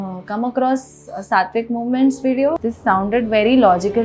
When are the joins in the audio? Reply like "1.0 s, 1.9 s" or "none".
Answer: 2.6 s